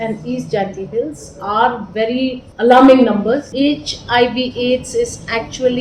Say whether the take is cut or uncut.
cut